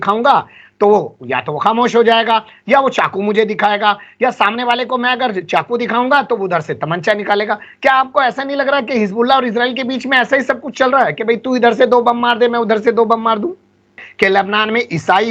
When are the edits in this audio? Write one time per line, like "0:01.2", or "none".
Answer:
0:14.0